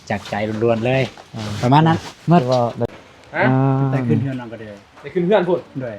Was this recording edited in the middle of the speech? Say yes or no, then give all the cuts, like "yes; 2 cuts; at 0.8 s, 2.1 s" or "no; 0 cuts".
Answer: yes; 1 cut; at 2.9 s